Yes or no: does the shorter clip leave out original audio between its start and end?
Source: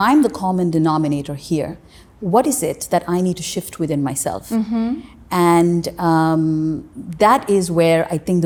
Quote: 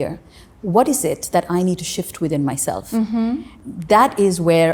yes